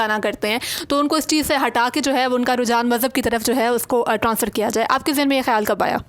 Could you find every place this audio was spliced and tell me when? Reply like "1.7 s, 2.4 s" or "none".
none